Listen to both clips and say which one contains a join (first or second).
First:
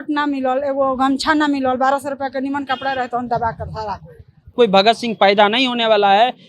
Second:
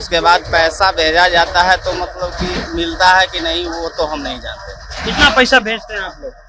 first